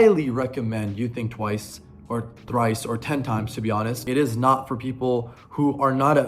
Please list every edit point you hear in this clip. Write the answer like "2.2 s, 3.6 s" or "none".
4.0 s